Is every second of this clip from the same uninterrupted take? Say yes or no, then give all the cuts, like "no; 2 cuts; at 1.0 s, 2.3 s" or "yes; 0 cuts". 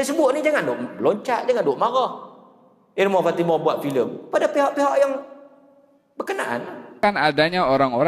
no; 1 cut; at 7.0 s